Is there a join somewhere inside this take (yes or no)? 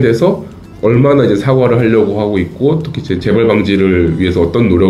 no